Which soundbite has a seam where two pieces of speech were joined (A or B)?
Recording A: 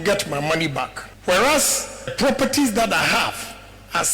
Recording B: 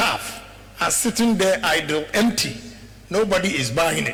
A